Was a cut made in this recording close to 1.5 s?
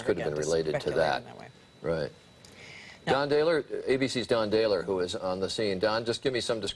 yes; 1 cut; at 1.5 s

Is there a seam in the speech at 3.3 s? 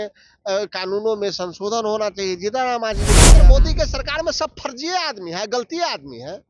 yes; 1 cut; at 3.3 s

